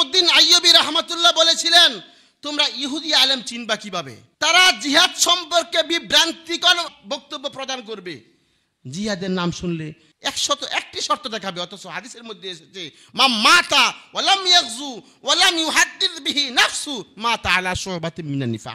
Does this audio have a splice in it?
yes; 1 cut; at 4.2 s

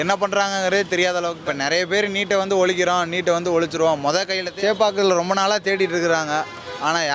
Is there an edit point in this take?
yes; 2 cuts; at 1.3 s, 4.4 s

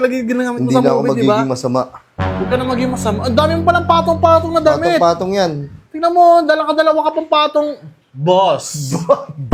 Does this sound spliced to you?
no; 0 cuts

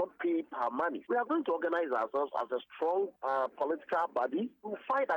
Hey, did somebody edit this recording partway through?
yes; 1 cut; at 1.0 s

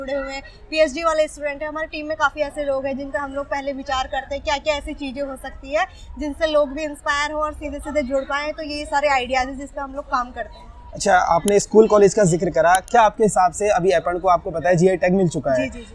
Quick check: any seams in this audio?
no; 0 cuts

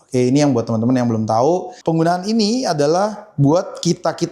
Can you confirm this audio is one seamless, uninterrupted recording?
no; 1 cut; at 1.7 s

